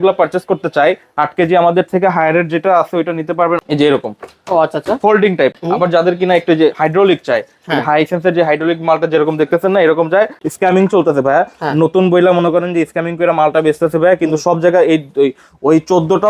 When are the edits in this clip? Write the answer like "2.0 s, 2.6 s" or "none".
3.6 s, 5.6 s, 10.4 s